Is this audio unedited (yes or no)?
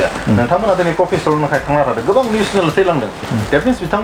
yes